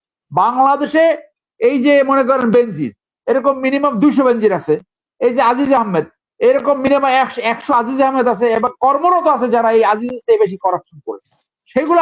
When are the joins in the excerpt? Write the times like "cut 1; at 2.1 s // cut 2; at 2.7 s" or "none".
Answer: none